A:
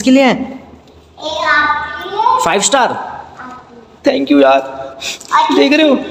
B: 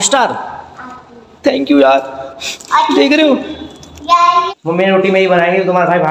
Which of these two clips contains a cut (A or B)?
B